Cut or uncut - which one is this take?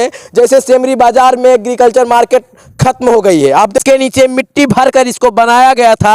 cut